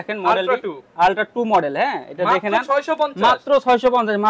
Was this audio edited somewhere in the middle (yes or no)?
no